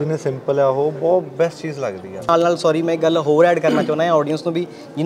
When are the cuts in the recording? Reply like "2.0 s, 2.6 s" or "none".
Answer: 2.3 s